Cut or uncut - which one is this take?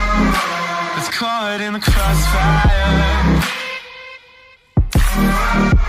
cut